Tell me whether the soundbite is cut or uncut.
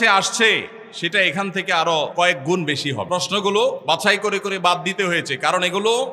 cut